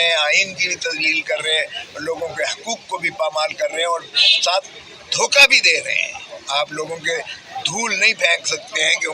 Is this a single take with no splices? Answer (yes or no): no